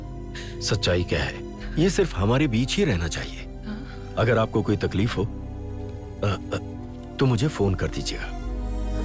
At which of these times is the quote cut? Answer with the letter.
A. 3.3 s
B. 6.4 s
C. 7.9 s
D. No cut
D